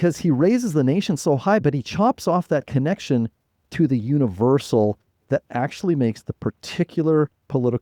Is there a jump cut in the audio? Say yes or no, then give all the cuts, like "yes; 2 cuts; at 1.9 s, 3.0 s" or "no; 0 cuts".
yes; 1 cut; at 1.6 s